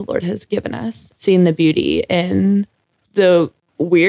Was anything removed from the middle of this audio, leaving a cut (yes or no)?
yes